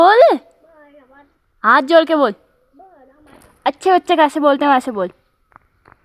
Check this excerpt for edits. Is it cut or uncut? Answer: uncut